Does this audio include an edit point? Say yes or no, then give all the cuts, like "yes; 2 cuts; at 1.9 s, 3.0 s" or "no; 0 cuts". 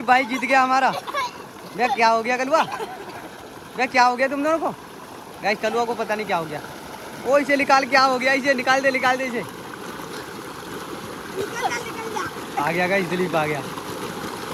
no; 0 cuts